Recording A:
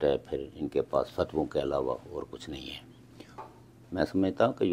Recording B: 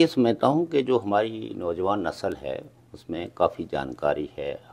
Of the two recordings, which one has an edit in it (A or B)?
A